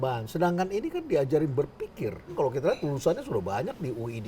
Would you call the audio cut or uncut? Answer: uncut